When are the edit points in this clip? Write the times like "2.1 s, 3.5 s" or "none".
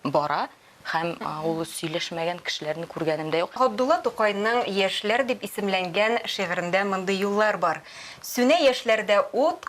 3.6 s